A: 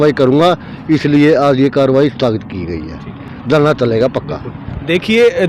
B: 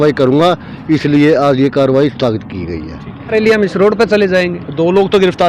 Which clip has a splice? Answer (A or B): B